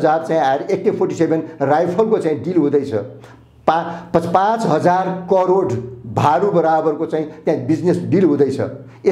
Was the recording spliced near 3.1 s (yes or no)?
no